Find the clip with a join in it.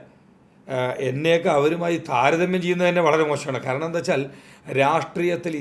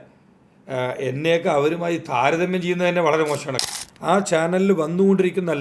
second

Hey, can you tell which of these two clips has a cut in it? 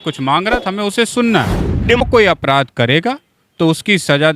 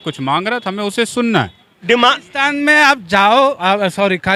first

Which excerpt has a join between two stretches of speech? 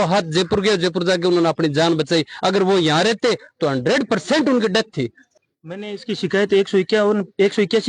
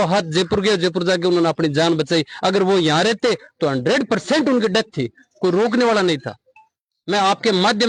first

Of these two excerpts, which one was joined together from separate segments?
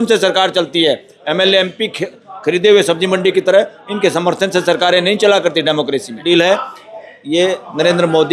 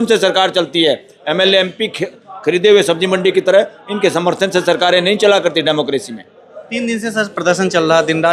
first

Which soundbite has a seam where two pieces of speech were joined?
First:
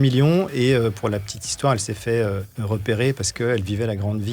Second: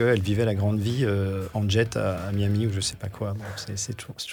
first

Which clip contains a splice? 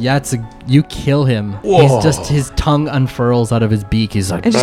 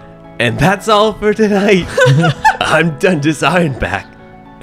first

